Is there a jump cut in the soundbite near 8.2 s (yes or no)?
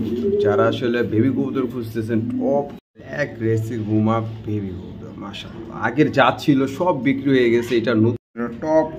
yes